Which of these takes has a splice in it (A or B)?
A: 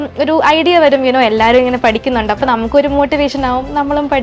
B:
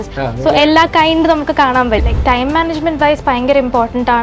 B